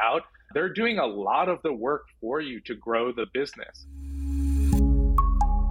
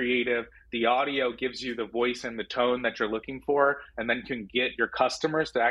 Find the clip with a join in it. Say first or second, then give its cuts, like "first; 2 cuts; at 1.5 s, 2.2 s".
first; 1 cut; at 3.7 s